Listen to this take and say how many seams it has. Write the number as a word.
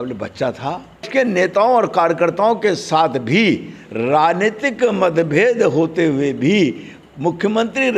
one